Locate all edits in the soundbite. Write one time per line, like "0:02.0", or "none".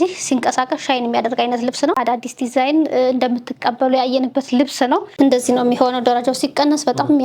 0:02.0
0:05.1